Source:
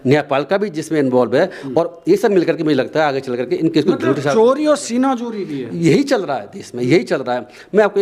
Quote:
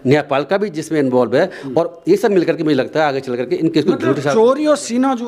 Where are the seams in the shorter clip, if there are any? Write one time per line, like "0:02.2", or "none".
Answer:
none